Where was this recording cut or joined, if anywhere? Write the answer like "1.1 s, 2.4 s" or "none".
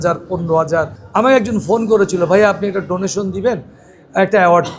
1.0 s